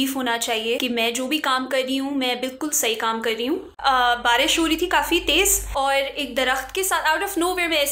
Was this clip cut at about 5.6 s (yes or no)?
yes